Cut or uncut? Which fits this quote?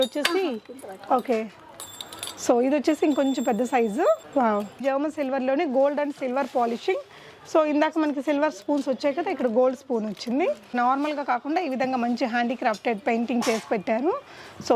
cut